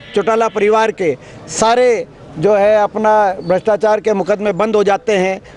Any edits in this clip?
no; 0 cuts

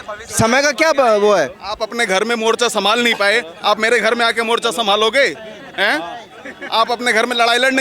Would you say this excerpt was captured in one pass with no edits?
yes; 0 cuts

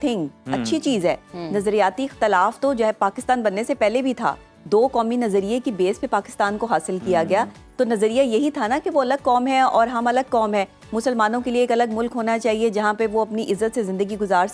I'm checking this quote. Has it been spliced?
no; 0 cuts

